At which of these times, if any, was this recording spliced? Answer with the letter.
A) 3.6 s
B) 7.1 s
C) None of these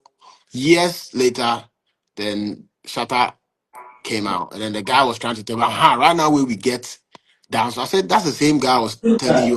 C